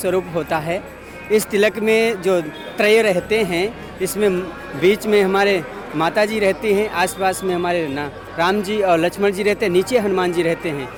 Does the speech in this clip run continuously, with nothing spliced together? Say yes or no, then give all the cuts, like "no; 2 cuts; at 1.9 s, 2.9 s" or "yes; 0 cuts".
yes; 0 cuts